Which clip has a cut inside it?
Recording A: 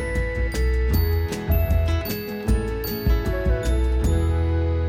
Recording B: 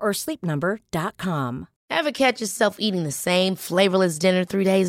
B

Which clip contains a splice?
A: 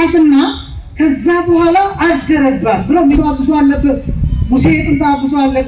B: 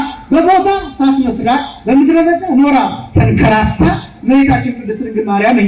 A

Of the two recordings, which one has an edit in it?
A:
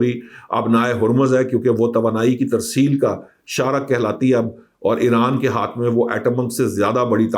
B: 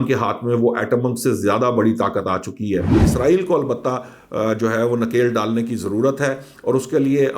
B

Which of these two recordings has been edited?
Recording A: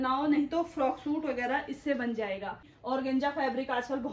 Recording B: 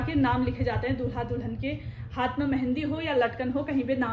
A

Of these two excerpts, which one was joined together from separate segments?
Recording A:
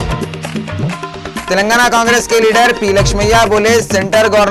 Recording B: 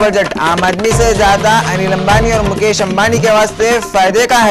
A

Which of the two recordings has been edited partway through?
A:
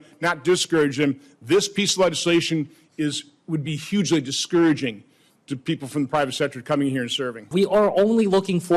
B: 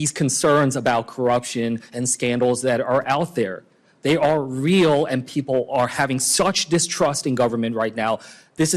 A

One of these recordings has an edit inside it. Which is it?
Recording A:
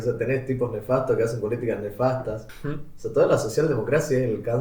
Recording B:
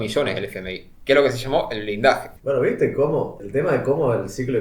B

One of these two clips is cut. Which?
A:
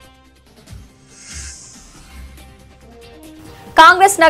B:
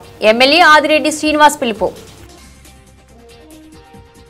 A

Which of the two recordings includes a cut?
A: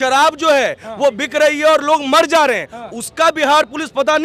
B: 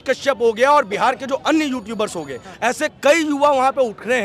B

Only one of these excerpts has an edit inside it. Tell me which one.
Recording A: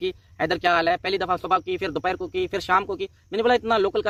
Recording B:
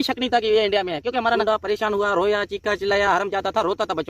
B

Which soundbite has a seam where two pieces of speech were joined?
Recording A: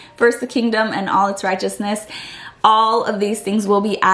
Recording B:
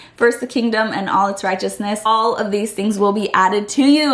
B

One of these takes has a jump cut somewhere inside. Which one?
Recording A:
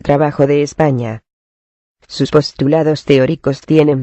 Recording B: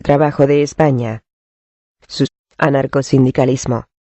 A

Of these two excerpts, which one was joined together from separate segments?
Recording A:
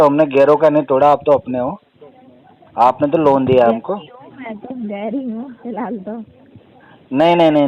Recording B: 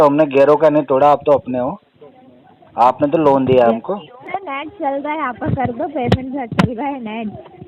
B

